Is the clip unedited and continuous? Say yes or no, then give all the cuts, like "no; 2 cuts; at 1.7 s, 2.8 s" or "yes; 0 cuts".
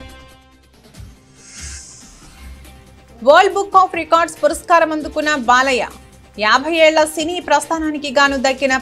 yes; 0 cuts